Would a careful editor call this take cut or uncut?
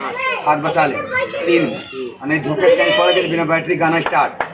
uncut